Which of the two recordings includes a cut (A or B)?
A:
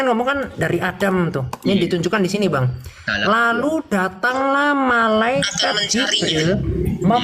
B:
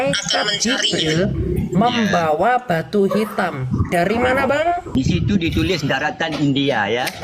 B